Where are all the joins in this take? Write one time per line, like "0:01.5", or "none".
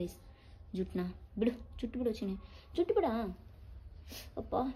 none